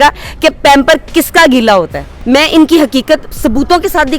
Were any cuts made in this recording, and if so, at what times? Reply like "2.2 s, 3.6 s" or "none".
2.2 s